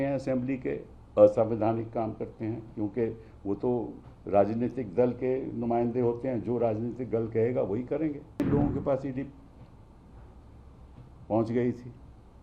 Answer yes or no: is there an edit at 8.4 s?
yes